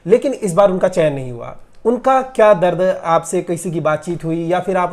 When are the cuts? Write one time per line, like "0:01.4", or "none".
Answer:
none